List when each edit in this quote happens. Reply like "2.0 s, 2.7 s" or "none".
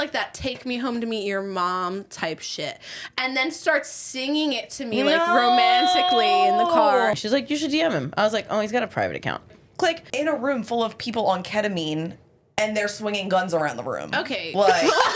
7.1 s, 9.9 s